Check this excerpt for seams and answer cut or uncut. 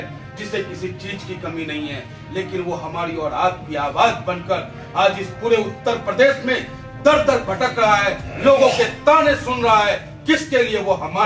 uncut